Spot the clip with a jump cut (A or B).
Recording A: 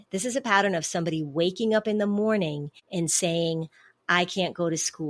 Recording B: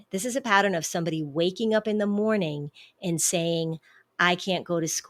A